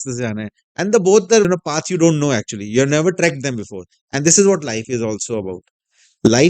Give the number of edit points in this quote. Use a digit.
1